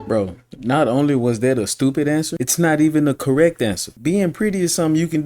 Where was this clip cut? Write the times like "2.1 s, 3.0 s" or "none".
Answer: 2.4 s

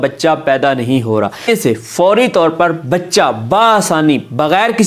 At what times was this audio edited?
1.5 s

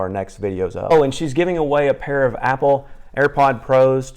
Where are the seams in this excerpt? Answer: 0.9 s

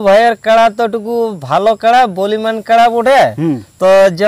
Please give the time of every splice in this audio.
none

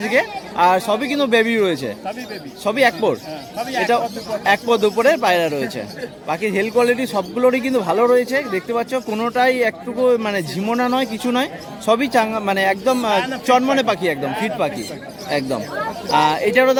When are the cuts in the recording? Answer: none

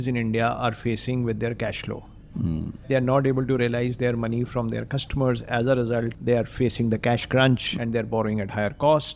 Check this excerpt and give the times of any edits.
2.9 s, 6.1 s

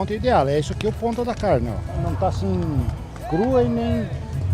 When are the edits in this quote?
1.9 s

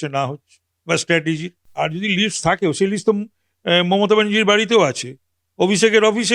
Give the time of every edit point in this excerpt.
1.6 s

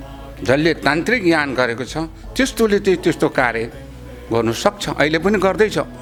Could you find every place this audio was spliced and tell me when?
none

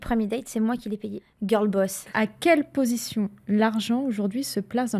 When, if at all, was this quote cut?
1.2 s, 2.0 s

